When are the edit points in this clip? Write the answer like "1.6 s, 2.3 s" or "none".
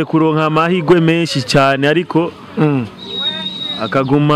none